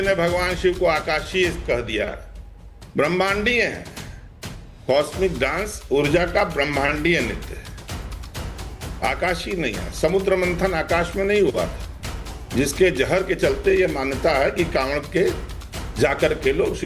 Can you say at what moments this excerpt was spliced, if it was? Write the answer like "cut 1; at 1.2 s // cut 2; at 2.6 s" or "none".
none